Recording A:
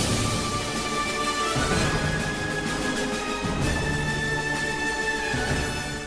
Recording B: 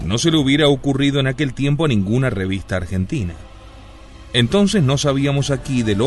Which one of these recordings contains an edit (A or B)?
B